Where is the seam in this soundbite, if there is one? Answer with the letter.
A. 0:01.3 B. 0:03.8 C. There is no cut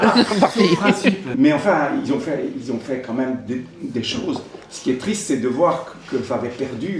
A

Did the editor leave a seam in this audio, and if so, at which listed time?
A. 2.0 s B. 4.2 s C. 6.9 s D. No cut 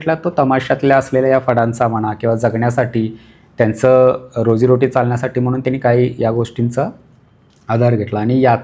D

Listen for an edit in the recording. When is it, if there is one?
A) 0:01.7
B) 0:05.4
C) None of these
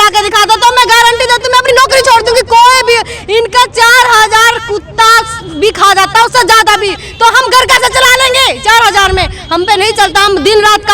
A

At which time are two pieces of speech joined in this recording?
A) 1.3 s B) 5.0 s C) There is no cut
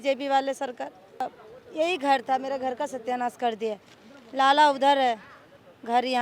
A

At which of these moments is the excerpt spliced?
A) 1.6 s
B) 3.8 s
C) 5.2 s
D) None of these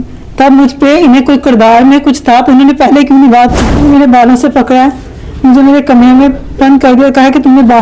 B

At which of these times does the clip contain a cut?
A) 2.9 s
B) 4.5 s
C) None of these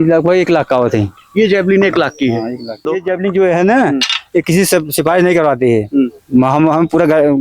A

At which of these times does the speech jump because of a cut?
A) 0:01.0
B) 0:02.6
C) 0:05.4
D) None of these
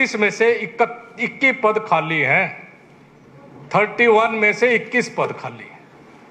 D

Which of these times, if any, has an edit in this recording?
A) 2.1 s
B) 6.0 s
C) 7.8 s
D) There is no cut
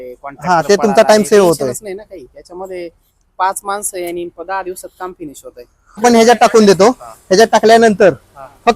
B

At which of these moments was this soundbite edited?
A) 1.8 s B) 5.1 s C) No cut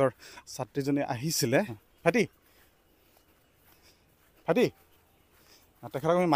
A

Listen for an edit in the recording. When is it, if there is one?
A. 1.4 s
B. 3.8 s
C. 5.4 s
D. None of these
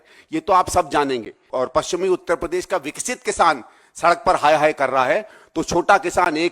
A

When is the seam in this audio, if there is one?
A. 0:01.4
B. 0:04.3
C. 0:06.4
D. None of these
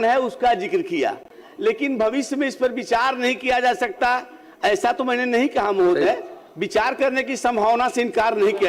D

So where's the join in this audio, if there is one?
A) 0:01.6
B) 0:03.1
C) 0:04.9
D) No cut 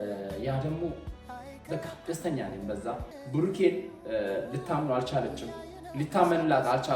B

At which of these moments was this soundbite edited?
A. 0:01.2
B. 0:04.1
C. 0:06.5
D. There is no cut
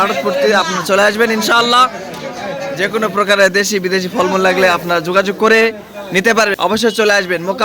C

